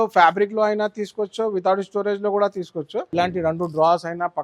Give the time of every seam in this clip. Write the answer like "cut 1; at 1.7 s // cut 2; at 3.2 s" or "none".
cut 1; at 3.1 s